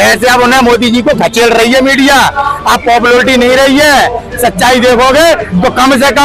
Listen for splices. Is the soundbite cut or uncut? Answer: uncut